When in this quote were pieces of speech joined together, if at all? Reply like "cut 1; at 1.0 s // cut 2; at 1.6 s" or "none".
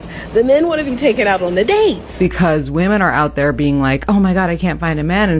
cut 1; at 2.1 s